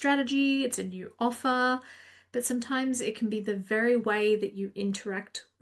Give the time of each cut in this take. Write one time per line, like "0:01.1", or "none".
none